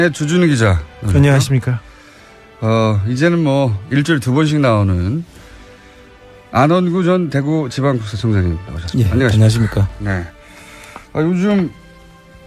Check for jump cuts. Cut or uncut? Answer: uncut